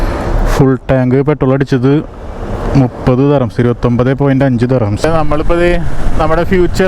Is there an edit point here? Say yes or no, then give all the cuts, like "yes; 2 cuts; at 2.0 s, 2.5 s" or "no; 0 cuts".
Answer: yes; 1 cut; at 5.0 s